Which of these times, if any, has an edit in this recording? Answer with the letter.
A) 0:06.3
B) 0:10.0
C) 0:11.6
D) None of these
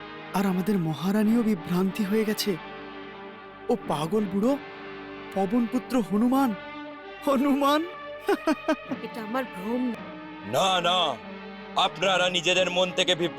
B